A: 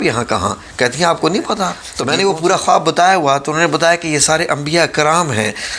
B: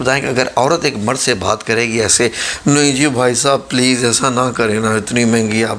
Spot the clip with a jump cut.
A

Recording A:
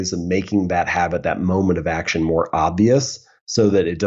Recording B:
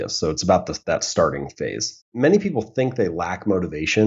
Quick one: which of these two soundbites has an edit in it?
B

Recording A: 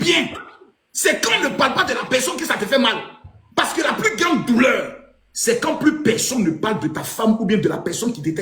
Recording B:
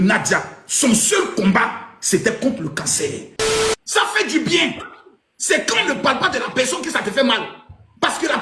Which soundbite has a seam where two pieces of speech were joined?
B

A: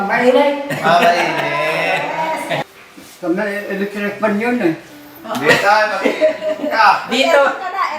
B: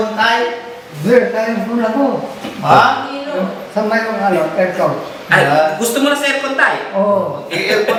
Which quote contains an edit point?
A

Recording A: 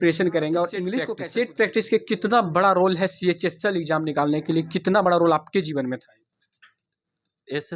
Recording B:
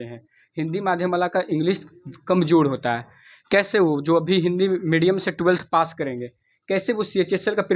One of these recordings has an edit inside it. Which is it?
A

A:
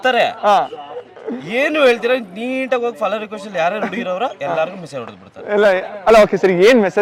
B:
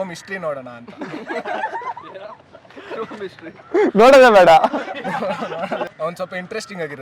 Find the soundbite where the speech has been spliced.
B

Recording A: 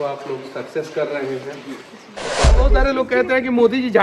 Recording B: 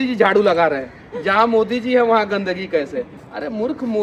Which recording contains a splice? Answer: A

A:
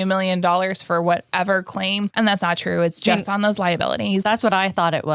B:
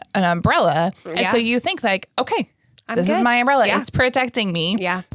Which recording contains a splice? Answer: A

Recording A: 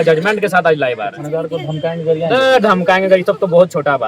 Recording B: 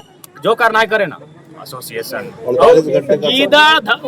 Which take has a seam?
A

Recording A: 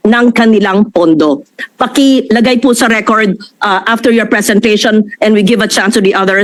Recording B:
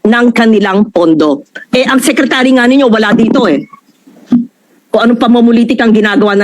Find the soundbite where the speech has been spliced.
B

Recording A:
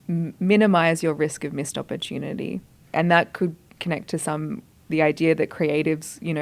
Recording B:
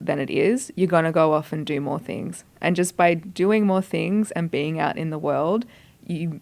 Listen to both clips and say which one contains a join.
A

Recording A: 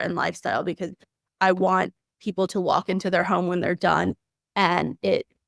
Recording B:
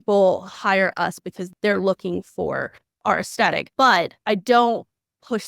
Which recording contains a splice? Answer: B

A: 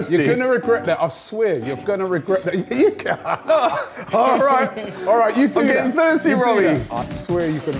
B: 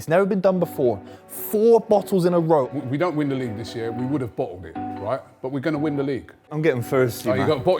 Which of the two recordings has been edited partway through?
B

